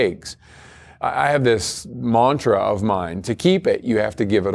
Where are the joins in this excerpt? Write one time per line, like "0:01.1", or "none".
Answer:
0:01.5
0:03.2

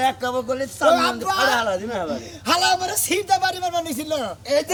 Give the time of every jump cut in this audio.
none

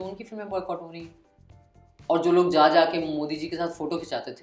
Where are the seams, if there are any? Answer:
none

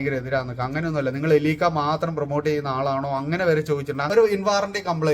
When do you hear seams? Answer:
0:04.1

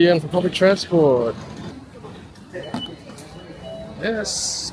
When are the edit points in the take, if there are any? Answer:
0:01.7

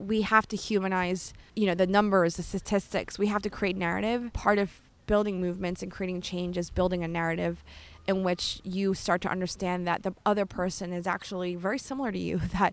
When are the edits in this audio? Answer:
0:01.4
0:04.3

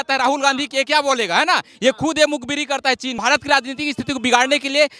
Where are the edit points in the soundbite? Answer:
0:03.1

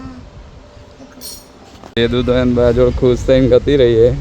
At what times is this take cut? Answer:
0:01.9

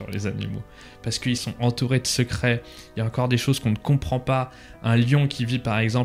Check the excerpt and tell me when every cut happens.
0:01.5

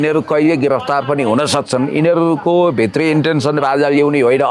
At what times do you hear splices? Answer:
none

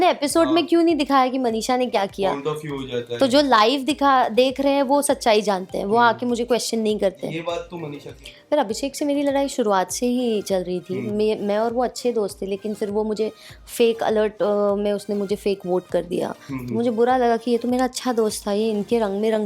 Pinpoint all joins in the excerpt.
none

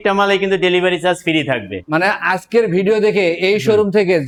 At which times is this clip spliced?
none

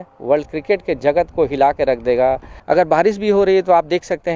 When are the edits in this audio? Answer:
0:02.5

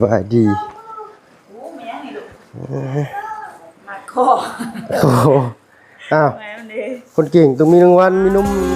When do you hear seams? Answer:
0:02.4

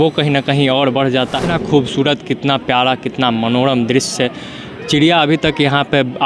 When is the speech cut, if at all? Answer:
0:01.5

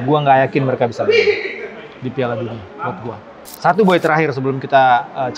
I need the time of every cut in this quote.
0:03.4

